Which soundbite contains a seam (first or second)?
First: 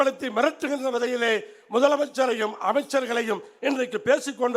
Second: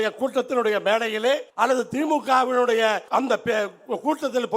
second